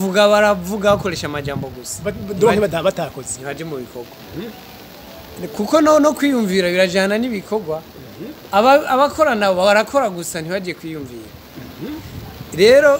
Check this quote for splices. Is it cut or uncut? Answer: uncut